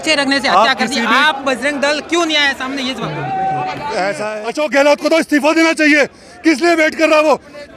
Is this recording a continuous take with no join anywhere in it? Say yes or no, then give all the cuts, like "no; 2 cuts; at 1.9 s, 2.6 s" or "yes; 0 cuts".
no; 1 cut; at 4.3 s